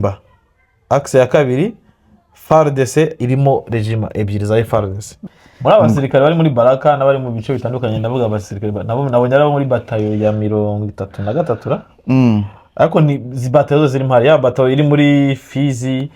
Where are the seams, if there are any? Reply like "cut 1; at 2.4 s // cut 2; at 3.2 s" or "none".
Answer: cut 1; at 5.2 s